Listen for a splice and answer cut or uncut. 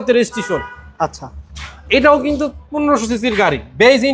uncut